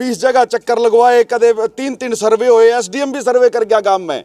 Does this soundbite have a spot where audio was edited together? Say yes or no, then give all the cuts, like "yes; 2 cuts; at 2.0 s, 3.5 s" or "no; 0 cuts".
no; 0 cuts